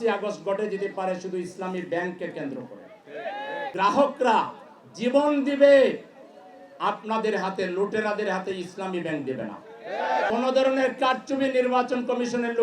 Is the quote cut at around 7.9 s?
no; 2 cuts; at 3.6 s, 10.3 s

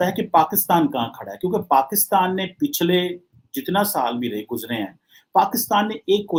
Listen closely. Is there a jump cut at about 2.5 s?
no; 0 cuts

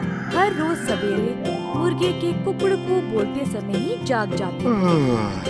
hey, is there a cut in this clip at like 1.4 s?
no; 0 cuts

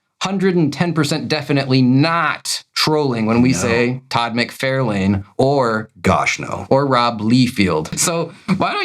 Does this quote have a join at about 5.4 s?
no; 1 cut; at 7.9 s

